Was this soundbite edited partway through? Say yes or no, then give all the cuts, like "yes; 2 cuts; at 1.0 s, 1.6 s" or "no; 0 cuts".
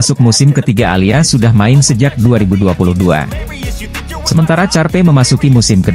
no; 0 cuts